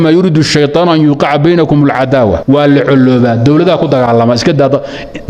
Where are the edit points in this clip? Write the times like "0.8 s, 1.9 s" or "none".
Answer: 2.4 s